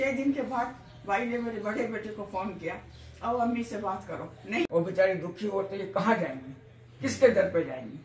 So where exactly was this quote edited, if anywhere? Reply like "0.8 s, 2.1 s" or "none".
4.6 s